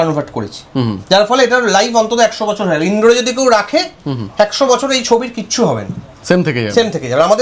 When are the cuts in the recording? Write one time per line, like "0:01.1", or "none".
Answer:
none